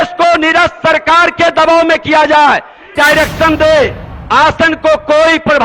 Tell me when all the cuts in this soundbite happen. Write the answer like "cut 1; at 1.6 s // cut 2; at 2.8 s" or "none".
cut 1; at 2.9 s